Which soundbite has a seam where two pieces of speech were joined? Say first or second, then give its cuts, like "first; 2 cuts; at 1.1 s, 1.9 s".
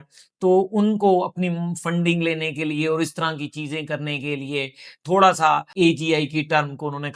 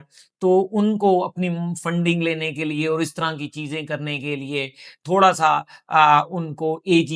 first; 1 cut; at 5.7 s